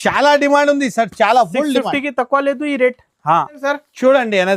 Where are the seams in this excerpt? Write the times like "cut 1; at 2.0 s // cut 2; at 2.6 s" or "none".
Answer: cut 1; at 3.5 s